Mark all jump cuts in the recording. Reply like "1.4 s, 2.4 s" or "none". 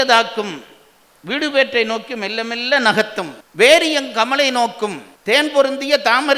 3.4 s, 5.1 s